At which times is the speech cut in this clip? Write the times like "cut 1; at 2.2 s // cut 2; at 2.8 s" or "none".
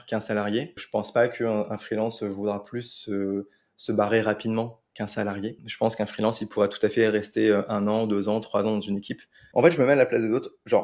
cut 1; at 0.8 s // cut 2; at 5.6 s // cut 3; at 9.4 s